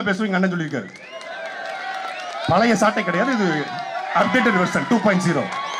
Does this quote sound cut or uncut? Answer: uncut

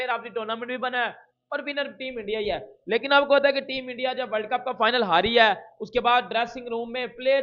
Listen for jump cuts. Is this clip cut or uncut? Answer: uncut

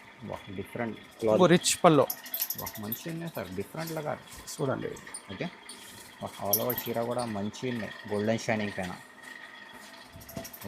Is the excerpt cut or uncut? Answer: cut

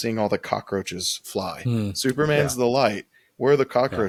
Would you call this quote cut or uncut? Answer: uncut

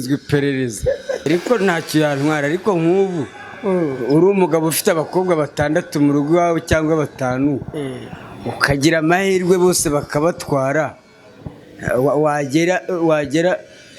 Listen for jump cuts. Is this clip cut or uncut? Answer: cut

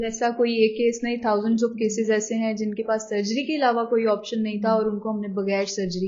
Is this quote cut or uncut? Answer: uncut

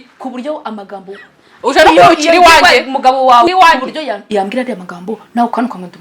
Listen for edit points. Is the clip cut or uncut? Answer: cut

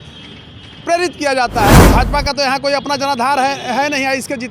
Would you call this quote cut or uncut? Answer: cut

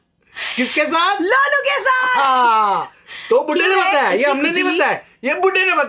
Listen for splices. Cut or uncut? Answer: uncut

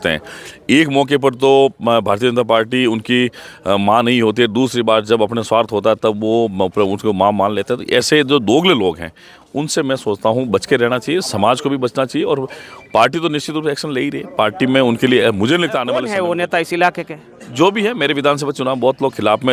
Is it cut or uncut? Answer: cut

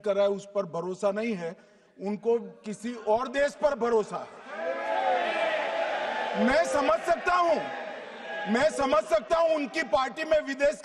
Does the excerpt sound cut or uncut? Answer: uncut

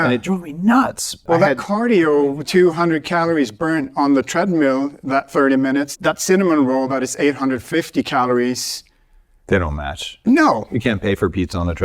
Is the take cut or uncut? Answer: cut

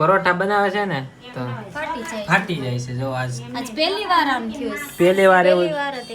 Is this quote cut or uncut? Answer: uncut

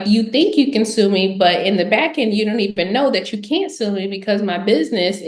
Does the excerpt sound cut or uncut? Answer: uncut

